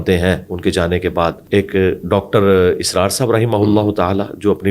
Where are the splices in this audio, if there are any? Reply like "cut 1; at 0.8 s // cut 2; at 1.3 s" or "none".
cut 1; at 1.4 s